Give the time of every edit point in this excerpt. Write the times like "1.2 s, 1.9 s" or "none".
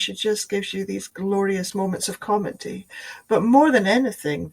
1.7 s